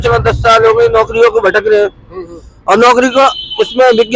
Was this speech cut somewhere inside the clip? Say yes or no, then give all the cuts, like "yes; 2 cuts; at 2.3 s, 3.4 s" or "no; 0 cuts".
no; 0 cuts